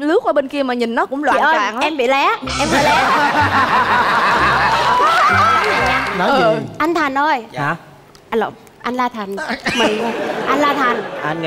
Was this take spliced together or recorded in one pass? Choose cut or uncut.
cut